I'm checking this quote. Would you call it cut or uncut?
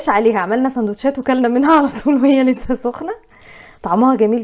uncut